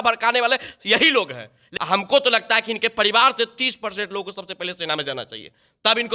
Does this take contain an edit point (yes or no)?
yes